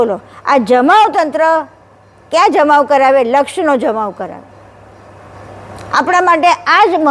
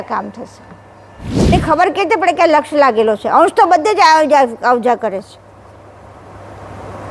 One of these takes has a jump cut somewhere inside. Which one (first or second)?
second